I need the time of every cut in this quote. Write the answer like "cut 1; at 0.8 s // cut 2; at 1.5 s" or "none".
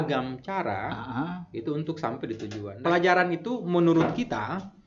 cut 1; at 2.6 s